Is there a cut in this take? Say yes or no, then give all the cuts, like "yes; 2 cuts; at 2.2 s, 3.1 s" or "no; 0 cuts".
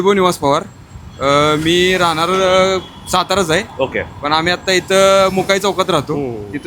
no; 0 cuts